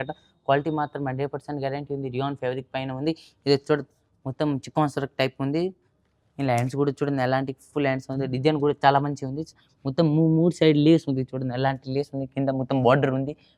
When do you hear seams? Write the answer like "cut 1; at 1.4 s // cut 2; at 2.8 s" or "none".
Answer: none